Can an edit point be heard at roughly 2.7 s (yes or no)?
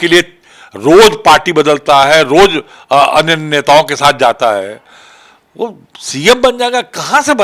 no